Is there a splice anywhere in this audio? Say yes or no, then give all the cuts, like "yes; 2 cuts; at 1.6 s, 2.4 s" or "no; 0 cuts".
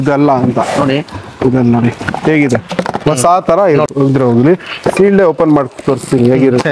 yes; 1 cut; at 3.9 s